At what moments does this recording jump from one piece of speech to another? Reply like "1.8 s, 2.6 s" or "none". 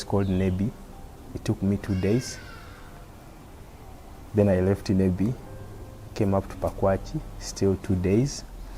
none